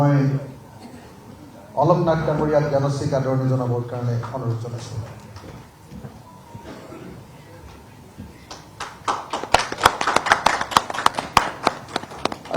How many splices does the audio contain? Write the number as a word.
one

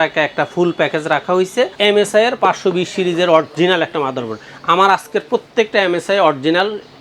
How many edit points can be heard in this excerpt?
one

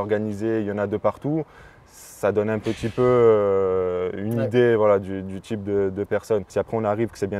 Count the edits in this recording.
one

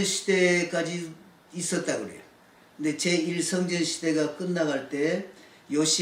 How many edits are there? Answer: zero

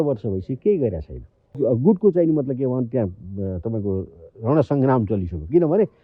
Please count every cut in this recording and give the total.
one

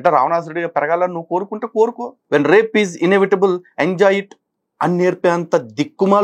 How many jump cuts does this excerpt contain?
one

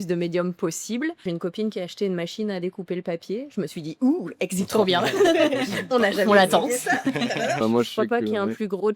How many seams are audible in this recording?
two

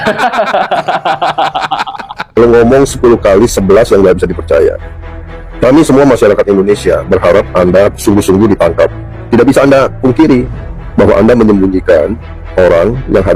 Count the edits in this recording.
one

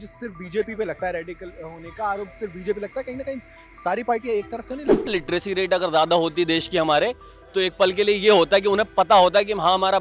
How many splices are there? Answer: one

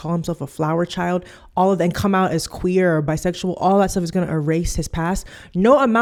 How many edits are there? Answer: zero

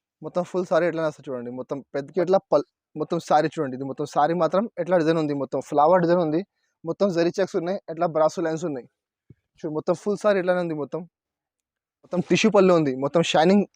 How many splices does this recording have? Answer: two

